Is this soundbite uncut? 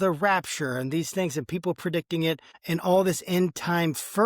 no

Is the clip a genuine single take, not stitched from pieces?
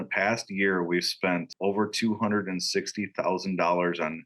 yes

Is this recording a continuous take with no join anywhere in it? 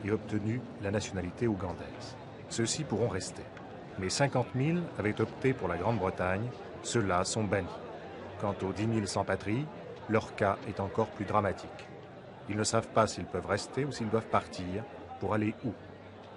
no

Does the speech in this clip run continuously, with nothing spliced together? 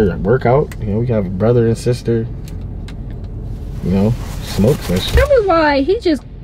no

